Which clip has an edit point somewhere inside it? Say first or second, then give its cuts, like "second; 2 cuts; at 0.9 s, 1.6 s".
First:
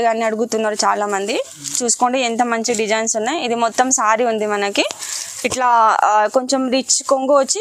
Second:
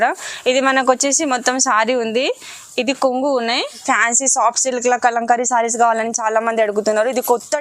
second; 1 cut; at 3.8 s